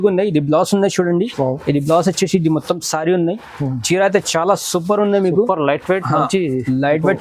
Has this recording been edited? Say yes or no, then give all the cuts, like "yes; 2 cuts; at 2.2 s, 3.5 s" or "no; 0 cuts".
no; 0 cuts